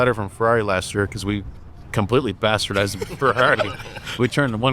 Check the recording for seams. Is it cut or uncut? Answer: uncut